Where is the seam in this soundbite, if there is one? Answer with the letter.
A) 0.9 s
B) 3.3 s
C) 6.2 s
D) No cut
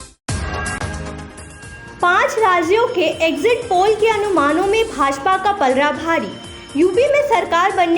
A